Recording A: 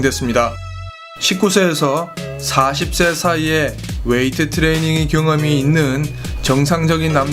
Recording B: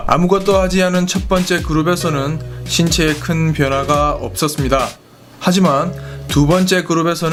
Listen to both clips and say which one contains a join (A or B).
A